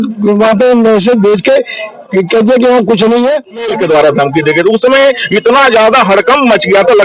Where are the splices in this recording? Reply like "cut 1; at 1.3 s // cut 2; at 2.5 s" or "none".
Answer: cut 1; at 3.7 s